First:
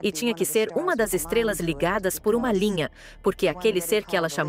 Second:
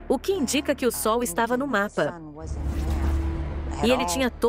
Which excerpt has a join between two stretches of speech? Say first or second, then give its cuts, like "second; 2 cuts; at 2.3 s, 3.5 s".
second; 2 cuts; at 2.4 s, 3.8 s